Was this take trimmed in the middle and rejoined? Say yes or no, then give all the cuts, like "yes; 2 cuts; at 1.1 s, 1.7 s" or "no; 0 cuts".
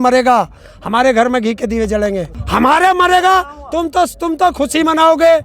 yes; 1 cut; at 2.4 s